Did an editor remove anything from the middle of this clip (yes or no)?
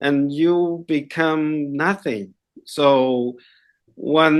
no